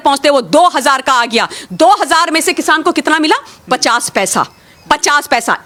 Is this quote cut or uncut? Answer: uncut